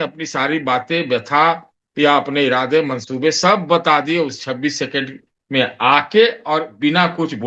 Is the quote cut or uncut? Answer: uncut